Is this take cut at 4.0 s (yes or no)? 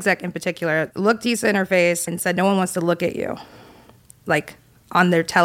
no